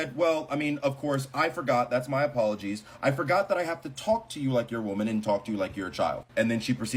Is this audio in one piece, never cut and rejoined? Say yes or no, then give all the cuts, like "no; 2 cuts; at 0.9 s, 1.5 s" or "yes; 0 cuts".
yes; 0 cuts